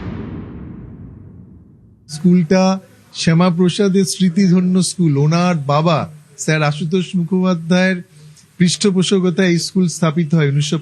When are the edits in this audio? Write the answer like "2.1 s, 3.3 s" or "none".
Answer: 1.6 s